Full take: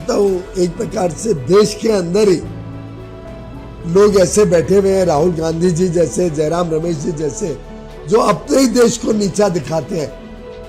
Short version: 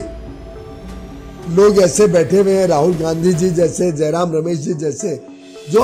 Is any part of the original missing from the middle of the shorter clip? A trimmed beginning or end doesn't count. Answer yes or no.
no